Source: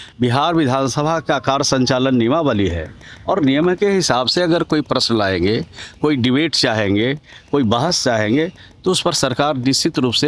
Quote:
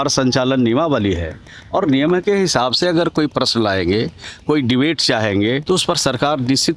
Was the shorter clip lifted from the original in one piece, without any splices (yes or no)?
no